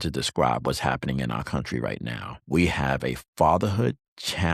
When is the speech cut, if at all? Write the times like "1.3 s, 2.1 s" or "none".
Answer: 2.3 s